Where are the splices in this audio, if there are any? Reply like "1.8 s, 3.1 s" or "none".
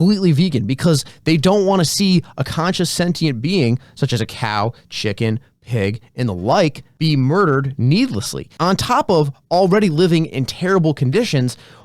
6.9 s